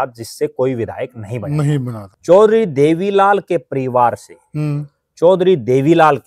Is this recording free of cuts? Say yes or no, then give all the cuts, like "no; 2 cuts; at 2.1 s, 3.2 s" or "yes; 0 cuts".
no; 1 cut; at 2.1 s